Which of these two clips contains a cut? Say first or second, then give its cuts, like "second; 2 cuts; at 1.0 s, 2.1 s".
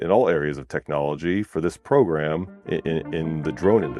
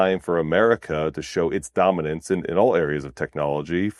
first; 1 cut; at 2.5 s